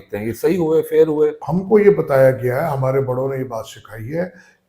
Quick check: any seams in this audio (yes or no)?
yes